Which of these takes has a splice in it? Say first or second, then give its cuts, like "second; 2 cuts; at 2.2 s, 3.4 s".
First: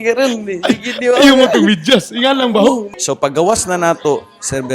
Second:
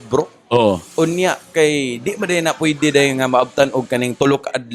first; 1 cut; at 2.8 s